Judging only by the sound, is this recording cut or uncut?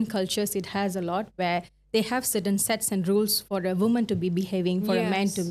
uncut